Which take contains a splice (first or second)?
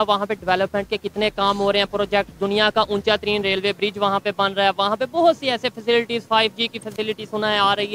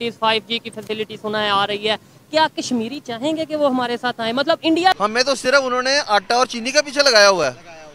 second